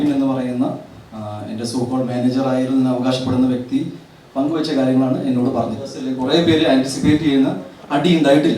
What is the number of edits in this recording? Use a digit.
1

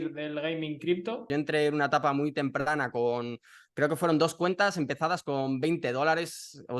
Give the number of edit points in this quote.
1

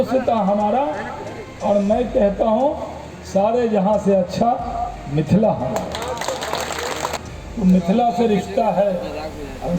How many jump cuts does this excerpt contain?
1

